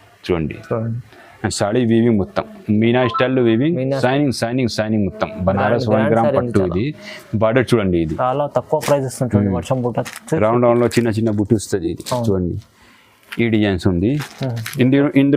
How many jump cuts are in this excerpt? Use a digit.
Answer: 1